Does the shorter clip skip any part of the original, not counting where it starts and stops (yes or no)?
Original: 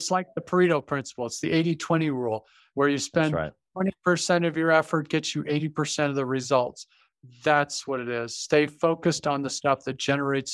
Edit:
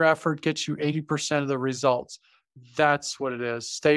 no